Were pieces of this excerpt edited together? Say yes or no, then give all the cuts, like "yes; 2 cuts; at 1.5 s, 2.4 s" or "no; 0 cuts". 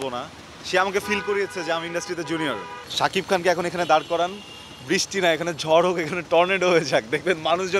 yes; 1 cut; at 2.8 s